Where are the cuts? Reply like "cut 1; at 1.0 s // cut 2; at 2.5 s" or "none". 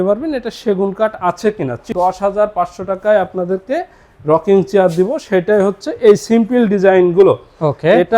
cut 1; at 1.9 s